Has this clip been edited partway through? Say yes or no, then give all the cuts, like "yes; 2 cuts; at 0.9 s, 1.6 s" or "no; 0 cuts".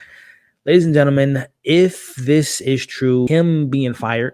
yes; 1 cut; at 3.3 s